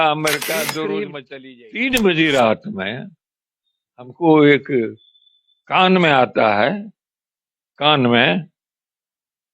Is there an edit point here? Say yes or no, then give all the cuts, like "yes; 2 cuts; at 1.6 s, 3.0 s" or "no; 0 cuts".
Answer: yes; 1 cut; at 1.1 s